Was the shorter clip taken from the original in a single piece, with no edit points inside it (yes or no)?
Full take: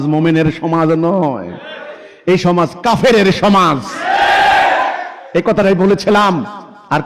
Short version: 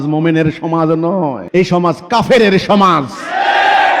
no